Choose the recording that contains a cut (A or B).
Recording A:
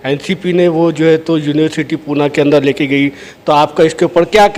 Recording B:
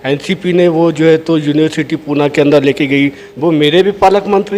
B